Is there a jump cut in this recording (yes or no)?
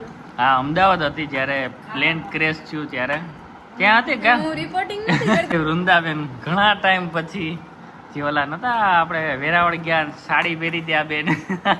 yes